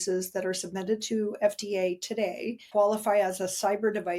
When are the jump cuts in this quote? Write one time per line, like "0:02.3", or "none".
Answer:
0:02.6